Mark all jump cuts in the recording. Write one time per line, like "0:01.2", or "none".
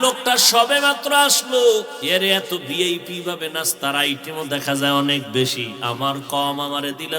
0:02.0